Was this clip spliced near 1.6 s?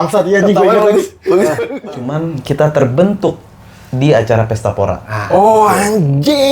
yes; 1 cut; at 1.6 s

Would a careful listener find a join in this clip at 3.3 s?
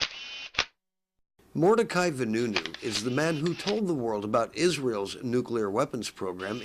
yes; 1 cut; at 3.3 s

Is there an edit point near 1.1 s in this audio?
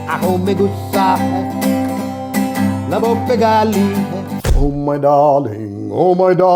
no; 1 cut; at 4.3 s

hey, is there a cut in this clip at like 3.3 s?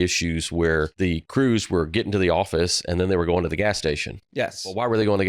no; 1 cut; at 0.9 s

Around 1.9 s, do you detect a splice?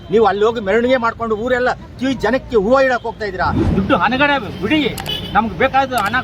no; 1 cut; at 3.6 s

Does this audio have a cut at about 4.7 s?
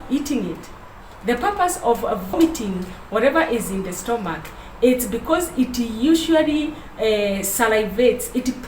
no; 1 cut; at 2.3 s

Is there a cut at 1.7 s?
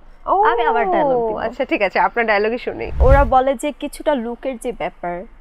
no; 1 cut; at 3.0 s

